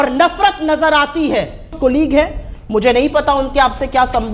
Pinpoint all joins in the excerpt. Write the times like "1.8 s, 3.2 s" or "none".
1.8 s

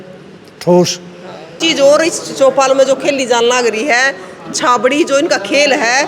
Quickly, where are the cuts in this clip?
1.6 s

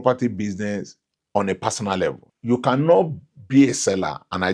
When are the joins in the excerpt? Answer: 2.3 s

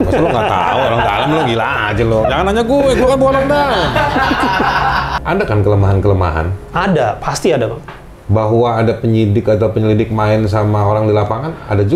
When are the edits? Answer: 5.2 s

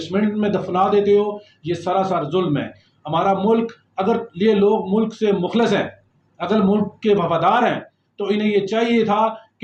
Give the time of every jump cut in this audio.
none

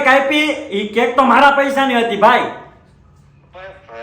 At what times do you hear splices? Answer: 2.7 s

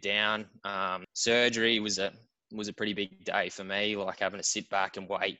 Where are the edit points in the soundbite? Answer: 1.1 s

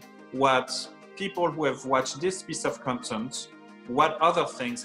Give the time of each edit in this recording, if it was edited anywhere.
none

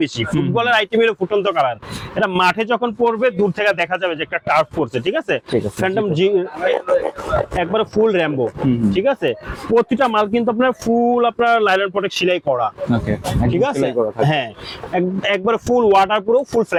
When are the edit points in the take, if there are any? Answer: none

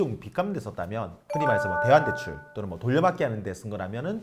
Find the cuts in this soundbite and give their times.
none

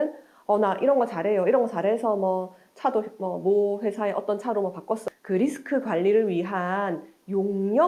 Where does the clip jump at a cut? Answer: 5.0 s

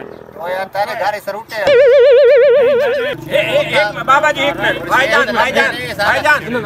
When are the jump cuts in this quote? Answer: 3.2 s

